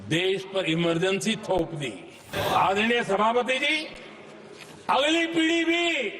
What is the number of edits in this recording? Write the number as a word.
one